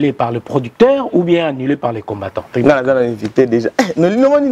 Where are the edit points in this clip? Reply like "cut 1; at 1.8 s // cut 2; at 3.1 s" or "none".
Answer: cut 1; at 2.5 s

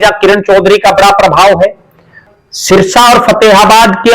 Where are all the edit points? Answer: cut 1; at 2.3 s

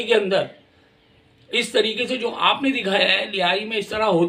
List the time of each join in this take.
none

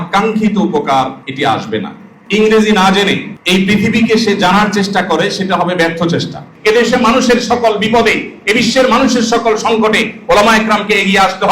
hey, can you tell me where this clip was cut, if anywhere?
cut 1; at 1.7 s // cut 2; at 3.3 s // cut 3; at 6.5 s

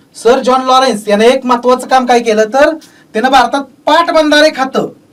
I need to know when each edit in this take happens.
none

